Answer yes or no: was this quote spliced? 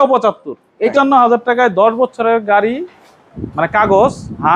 yes